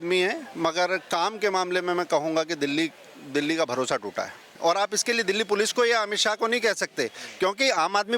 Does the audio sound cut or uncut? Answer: cut